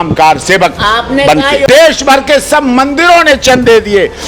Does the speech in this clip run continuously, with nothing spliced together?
no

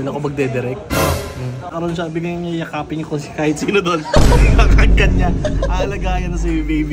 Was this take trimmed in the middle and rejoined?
yes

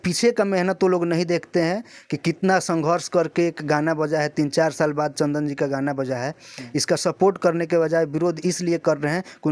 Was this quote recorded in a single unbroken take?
yes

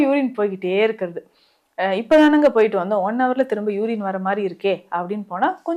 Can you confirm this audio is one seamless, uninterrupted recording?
yes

